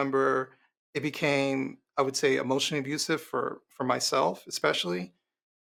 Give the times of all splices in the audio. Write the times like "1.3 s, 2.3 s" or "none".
none